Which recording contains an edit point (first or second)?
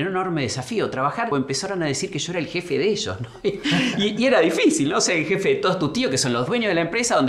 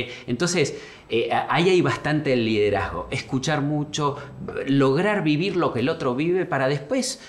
first